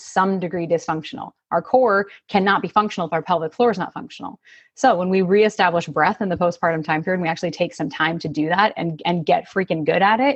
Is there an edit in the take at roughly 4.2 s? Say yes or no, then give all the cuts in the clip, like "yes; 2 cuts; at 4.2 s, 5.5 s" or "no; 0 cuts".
no; 0 cuts